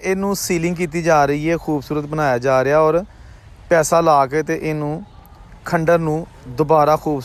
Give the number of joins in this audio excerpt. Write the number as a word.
zero